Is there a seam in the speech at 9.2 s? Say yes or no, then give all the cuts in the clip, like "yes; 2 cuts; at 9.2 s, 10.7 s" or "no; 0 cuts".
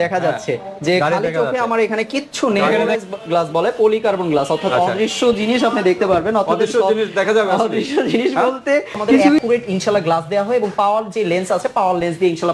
yes; 2 cuts; at 2.8 s, 9.2 s